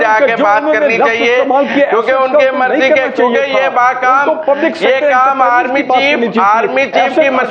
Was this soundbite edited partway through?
no; 0 cuts

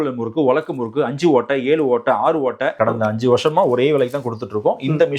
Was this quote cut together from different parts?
yes; 1 cut; at 2.7 s

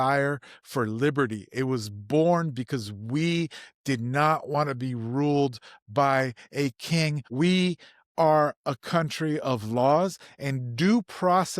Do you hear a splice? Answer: yes; 1 cut; at 7.2 s

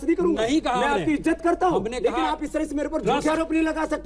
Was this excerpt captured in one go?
yes; 0 cuts

